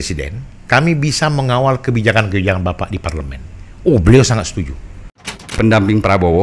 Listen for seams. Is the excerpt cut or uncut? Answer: cut